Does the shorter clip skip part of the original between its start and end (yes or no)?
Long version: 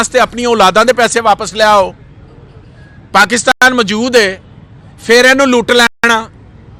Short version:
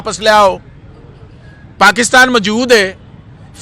yes